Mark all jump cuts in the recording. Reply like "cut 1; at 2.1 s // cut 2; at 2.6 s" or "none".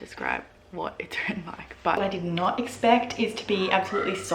cut 1; at 2.0 s